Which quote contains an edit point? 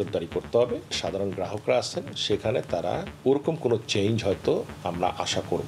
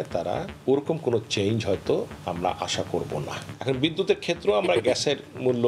first; 1 cut; at 1.0 s

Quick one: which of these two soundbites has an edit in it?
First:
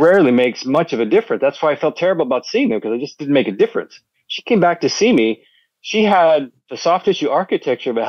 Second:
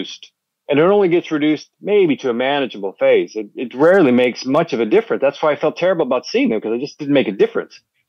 first; 1 cut; at 6.6 s

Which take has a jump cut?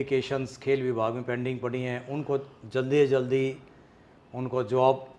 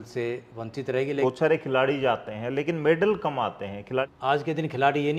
second; 2 cuts; at 1.2 s, 4.1 s

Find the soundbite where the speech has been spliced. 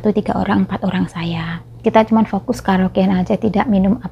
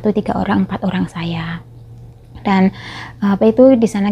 first; 1 cut; at 1.8 s

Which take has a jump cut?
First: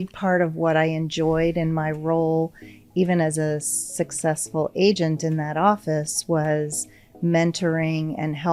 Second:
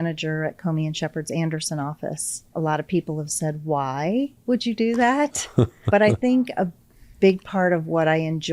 second; 2 cuts; at 2.4 s, 5.8 s

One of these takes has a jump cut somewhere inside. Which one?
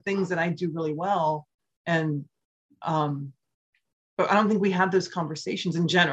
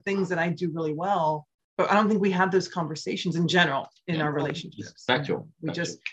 second; 1 cut; at 1.6 s

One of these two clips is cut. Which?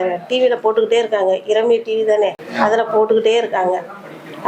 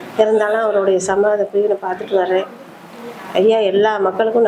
first; 1 cut; at 2.4 s

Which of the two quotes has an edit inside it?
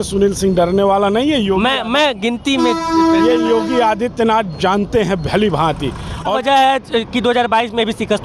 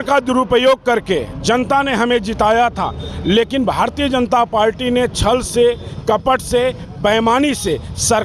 first; 1 cut; at 6.4 s

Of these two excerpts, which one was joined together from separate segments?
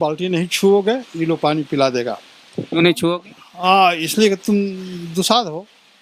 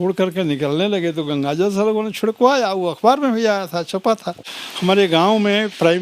second; 1 cut; at 4.4 s

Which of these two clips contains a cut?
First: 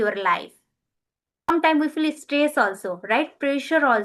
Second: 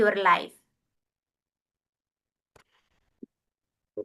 first; 1 cut; at 1.5 s

